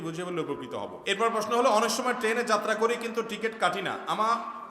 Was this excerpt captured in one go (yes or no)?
no